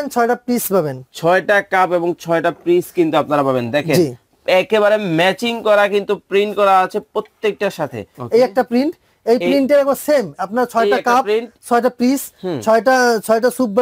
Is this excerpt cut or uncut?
cut